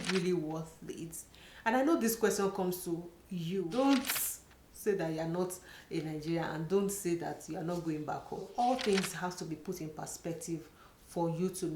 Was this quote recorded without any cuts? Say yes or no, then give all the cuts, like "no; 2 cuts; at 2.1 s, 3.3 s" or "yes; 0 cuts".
no; 2 cuts; at 3.7 s, 8.5 s